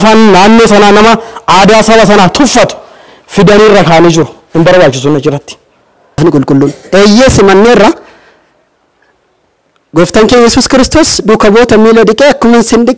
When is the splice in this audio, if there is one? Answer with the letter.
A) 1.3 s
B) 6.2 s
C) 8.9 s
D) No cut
B